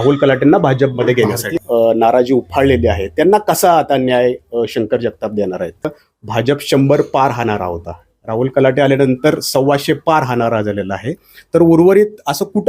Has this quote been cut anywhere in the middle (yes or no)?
yes